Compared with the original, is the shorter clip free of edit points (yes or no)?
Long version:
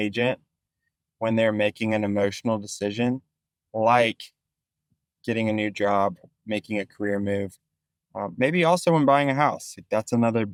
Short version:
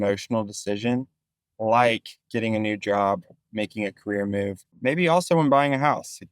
no